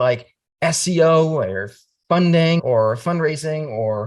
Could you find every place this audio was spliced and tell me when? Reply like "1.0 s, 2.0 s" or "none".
2.6 s